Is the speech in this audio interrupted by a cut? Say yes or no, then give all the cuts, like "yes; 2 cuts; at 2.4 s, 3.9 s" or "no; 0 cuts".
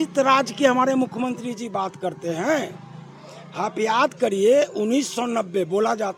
no; 0 cuts